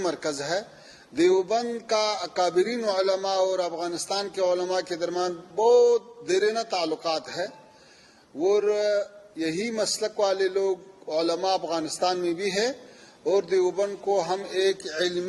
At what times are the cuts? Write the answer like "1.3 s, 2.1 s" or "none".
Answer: none